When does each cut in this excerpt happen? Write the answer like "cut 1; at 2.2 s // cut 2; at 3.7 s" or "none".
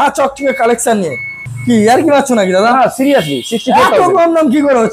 cut 1; at 1.4 s